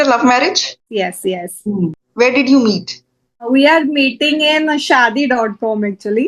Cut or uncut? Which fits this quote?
cut